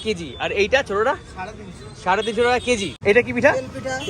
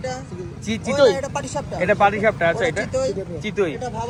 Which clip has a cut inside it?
first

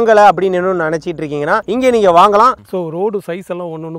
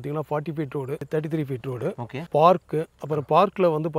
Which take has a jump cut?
first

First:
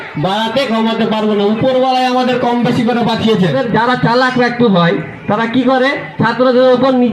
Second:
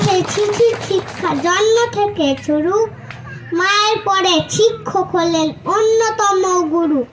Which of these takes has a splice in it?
first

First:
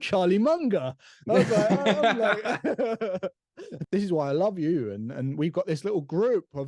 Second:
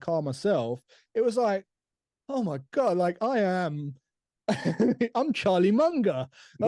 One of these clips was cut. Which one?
first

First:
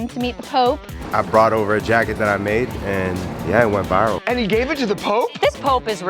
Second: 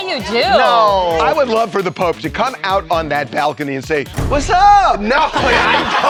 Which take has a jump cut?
first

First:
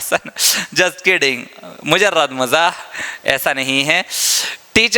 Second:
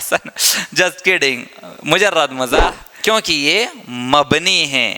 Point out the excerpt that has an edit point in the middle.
second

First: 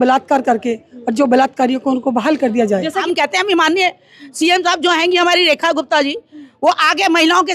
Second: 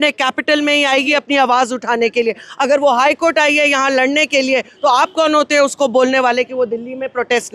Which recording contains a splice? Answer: first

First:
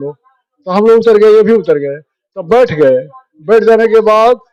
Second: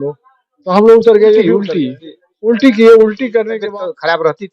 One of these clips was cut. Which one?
second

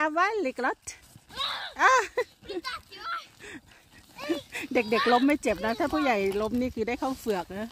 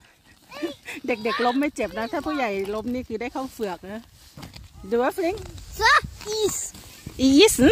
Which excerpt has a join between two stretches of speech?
second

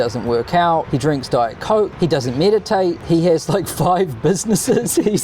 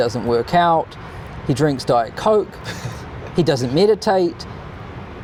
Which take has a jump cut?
first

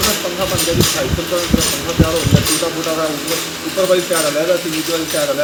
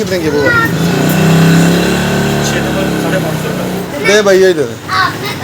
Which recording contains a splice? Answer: second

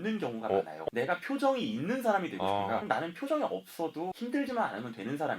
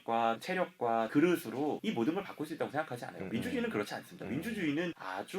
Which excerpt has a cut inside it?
first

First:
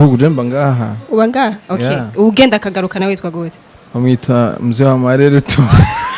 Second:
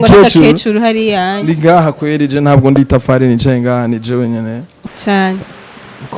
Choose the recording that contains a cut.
second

